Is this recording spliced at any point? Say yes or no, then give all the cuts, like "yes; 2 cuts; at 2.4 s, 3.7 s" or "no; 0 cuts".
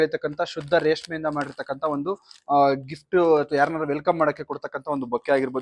no; 0 cuts